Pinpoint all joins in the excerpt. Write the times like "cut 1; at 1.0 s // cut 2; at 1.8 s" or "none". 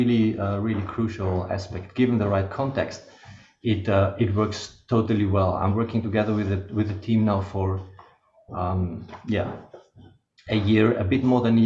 none